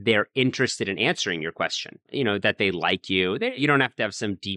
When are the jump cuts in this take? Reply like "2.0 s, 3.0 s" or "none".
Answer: 2.1 s, 3.6 s